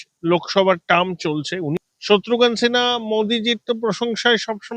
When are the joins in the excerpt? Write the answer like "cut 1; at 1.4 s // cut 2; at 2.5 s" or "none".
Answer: cut 1; at 1.7 s